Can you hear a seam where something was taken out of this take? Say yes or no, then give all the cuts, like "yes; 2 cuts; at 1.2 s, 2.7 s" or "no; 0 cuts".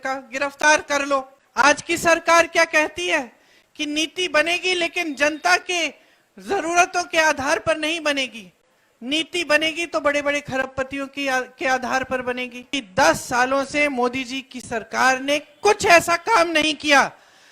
yes; 2 cuts; at 1.4 s, 12.8 s